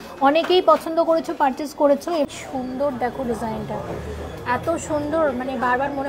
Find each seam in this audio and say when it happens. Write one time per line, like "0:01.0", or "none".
0:02.3

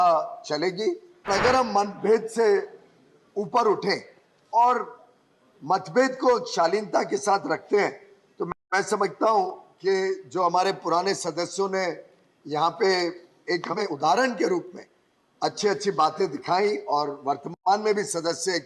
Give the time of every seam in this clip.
0:01.1

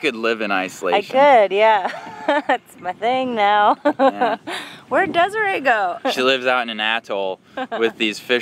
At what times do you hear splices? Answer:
0:06.0

